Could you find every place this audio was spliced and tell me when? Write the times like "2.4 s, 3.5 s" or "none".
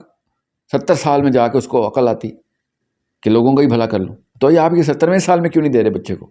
none